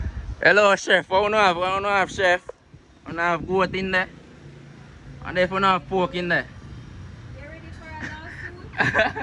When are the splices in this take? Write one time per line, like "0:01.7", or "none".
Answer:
none